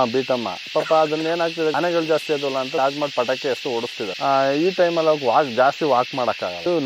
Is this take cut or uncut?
cut